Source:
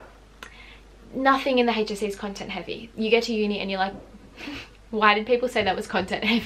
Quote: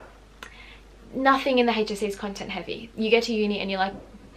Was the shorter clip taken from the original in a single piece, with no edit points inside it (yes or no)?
yes